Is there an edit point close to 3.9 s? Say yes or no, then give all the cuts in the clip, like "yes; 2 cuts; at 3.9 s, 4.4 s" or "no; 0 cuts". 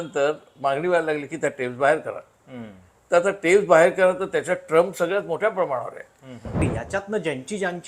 no; 1 cut; at 6.6 s